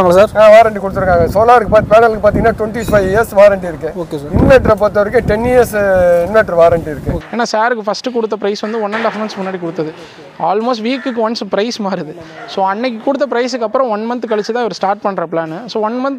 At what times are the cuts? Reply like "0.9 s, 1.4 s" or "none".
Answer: 7.2 s